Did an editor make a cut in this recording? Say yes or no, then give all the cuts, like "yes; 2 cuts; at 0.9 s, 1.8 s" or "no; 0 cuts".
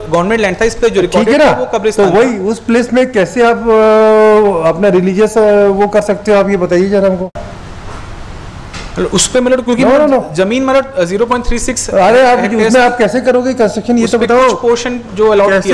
yes; 1 cut; at 7.3 s